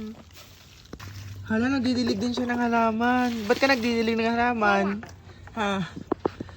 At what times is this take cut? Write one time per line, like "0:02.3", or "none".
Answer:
0:01.0